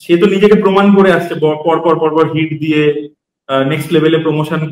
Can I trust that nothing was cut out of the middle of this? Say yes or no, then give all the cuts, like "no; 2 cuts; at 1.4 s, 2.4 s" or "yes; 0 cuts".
yes; 0 cuts